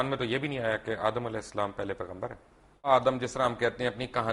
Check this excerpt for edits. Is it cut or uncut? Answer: cut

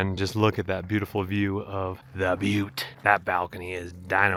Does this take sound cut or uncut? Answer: uncut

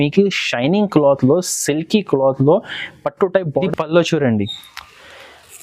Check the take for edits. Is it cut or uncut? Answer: cut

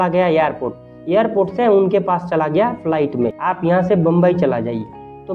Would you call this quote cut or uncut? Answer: cut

